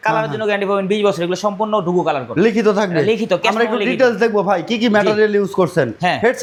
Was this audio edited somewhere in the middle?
no; 0 cuts

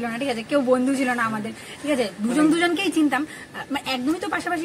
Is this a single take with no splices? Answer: yes; 0 cuts

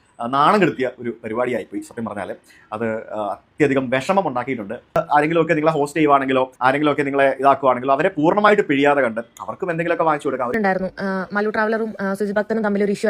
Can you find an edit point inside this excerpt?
yes; 2 cuts; at 5.0 s, 10.5 s

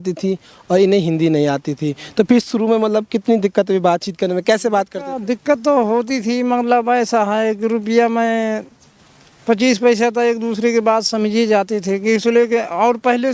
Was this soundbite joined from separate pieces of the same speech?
no; 0 cuts

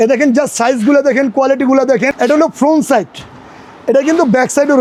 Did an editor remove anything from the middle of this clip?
no; 0 cuts

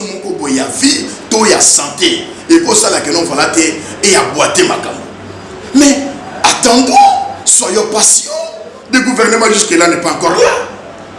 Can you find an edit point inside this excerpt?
no; 0 cuts

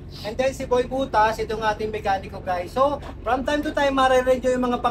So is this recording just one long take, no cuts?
yes; 0 cuts

